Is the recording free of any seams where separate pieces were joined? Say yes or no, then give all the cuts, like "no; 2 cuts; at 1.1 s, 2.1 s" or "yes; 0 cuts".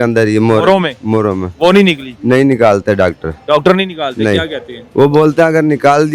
yes; 0 cuts